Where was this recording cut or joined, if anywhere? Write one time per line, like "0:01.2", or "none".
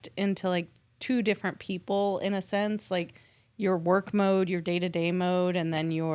none